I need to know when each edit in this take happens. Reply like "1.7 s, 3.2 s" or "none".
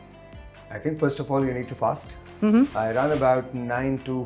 2.7 s